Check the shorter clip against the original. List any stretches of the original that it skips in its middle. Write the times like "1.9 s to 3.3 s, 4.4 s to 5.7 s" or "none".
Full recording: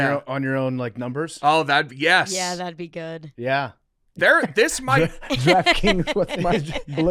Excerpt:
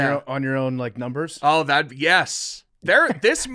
2.4 s to 3.7 s